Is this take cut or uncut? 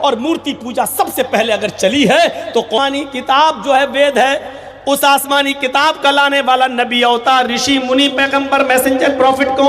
cut